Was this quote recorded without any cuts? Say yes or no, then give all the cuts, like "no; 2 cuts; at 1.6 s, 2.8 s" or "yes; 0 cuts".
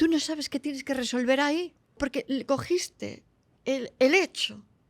no; 1 cut; at 2.0 s